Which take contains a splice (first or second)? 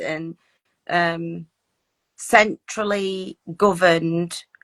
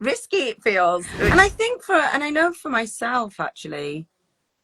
second